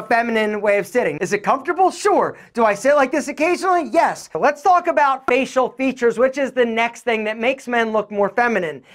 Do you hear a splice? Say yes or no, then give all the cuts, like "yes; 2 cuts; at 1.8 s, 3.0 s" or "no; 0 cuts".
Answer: yes; 2 cuts; at 1.2 s, 4.3 s